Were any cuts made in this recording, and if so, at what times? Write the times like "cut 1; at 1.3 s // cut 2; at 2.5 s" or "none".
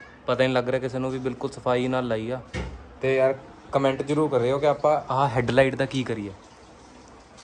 cut 1; at 2.8 s